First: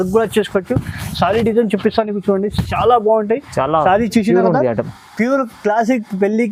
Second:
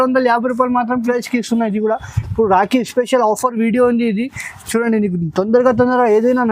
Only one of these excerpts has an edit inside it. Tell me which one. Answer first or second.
second